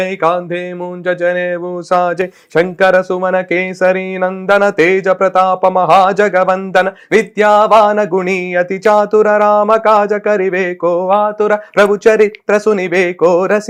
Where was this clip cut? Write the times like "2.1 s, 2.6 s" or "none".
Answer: none